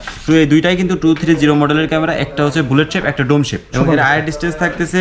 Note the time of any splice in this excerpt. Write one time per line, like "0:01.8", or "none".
0:03.8